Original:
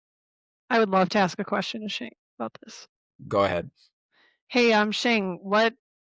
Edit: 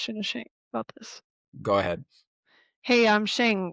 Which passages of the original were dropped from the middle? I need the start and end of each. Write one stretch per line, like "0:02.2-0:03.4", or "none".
none